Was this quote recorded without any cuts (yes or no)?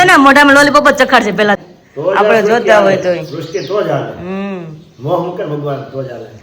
no